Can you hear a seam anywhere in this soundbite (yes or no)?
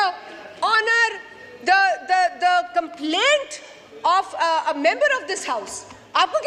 no